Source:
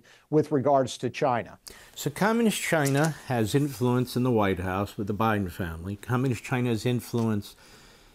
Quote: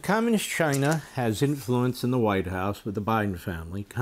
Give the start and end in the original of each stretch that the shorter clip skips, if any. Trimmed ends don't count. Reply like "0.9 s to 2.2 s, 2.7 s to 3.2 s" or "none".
none

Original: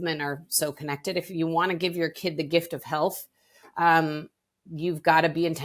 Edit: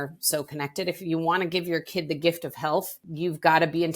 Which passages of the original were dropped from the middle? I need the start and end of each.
3.3 s to 4.6 s

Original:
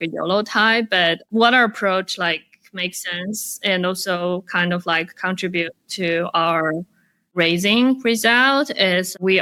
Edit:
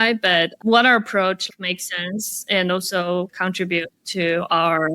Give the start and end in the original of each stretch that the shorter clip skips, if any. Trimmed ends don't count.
2.1 s to 2.6 s, 4.5 s to 5.2 s

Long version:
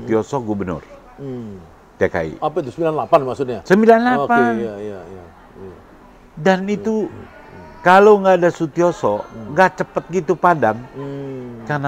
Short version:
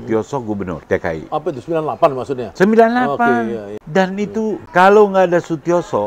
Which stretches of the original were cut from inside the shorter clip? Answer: 0.8 s to 1.9 s, 4.9 s to 6.3 s, 7.1 s to 7.7 s

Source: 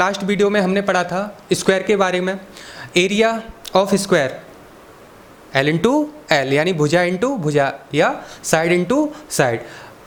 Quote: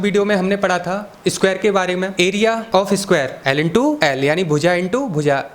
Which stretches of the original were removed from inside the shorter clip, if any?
2.7 s to 3.5 s, 4.9 s to 6.2 s

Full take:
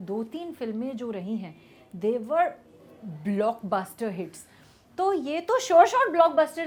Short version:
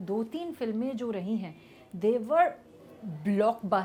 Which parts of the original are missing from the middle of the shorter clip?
none

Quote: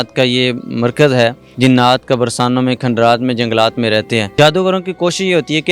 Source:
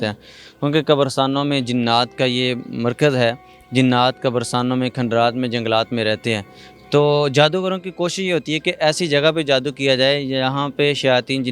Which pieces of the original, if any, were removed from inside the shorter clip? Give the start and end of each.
3.5 s to 3.6 s, 6.5 s to 7.3 s

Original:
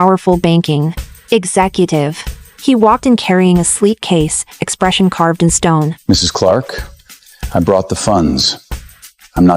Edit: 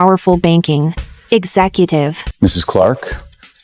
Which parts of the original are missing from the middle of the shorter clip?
2.3 s to 5.9 s

